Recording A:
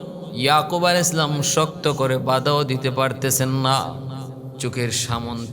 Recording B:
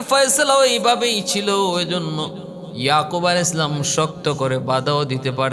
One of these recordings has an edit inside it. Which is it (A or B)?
A